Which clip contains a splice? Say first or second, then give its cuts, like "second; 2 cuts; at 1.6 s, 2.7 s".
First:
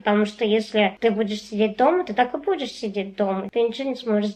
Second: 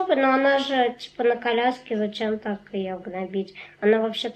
first; 2 cuts; at 0.9 s, 3.5 s